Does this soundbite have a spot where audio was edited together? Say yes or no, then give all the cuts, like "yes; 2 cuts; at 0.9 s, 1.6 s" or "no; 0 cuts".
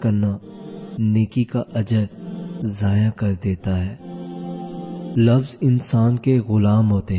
no; 0 cuts